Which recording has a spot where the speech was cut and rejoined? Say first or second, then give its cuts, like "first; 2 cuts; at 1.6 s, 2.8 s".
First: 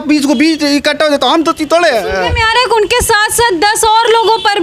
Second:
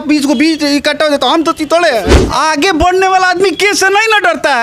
second; 1 cut; at 2.1 s